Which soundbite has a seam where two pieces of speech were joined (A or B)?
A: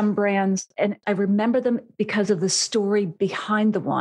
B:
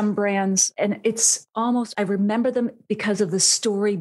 A